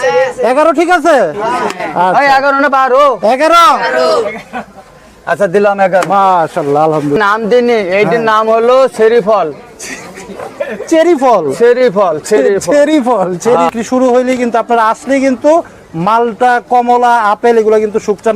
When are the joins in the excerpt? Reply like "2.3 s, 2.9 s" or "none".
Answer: 7.2 s, 13.7 s